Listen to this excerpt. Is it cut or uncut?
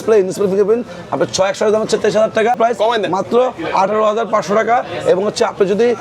cut